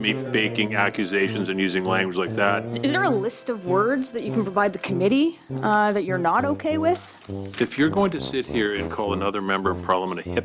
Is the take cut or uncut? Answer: cut